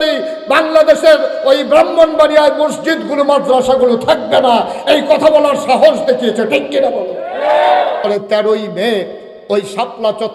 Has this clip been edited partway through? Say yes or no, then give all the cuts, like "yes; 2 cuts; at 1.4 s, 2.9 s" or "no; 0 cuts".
yes; 1 cut; at 8.0 s